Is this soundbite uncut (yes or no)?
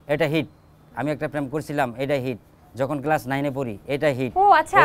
yes